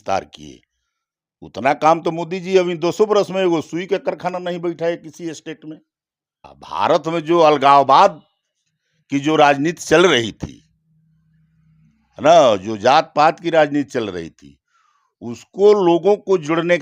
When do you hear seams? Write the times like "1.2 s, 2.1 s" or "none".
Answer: 6.6 s